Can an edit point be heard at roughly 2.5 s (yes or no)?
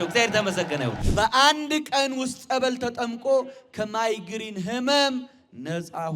no